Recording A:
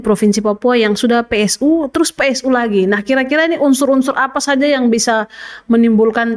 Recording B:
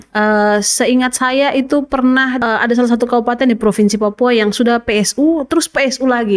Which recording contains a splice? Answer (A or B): B